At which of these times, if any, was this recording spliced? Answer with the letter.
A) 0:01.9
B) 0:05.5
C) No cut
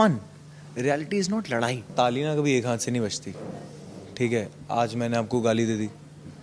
A